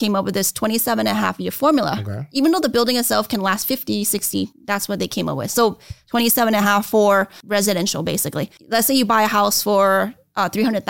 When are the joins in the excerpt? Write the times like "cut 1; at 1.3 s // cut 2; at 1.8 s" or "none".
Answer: cut 1; at 4.6 s // cut 2; at 7.4 s // cut 3; at 8.5 s